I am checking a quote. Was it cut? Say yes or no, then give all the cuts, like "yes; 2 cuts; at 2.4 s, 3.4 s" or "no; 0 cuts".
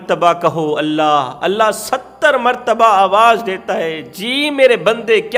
no; 0 cuts